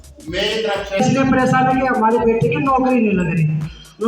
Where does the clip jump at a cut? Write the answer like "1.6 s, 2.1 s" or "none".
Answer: 1.0 s